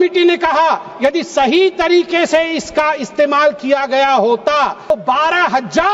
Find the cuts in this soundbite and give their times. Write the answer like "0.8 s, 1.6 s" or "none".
4.9 s